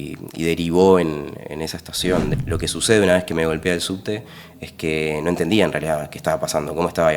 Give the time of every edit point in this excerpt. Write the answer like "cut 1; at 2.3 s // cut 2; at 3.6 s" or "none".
cut 1; at 2.3 s